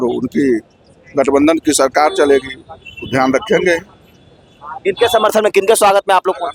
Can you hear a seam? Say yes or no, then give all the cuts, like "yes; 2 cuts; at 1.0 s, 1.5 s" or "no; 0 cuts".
no; 0 cuts